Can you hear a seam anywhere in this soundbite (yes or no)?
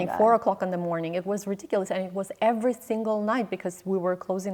no